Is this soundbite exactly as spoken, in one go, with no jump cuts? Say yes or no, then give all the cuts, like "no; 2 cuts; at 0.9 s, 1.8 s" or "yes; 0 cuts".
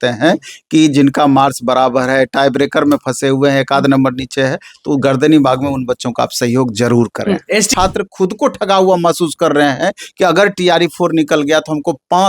no; 1 cut; at 7.7 s